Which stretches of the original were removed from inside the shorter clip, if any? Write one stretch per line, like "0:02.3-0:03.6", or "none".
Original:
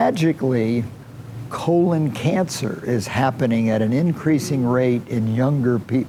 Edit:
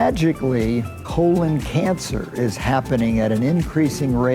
0:01.0-0:01.5